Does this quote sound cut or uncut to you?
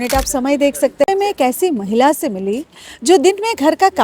cut